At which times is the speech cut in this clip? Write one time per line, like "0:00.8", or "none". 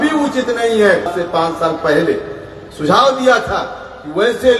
0:01.1